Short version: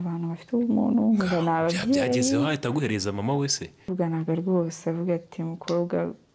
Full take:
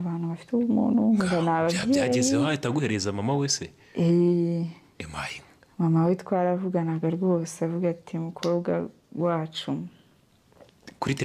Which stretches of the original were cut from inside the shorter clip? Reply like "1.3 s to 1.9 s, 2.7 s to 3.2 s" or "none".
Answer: 3.9 s to 6.6 s